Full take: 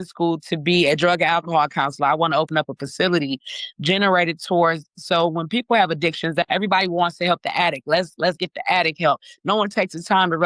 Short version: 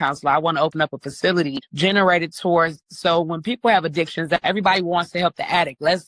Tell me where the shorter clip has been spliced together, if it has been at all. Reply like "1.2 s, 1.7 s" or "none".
1.6 s